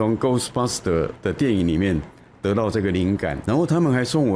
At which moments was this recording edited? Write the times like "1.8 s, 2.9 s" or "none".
3.4 s